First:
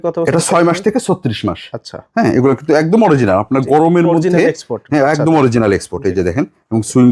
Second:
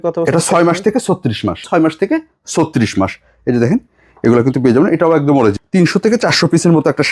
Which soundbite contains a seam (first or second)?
second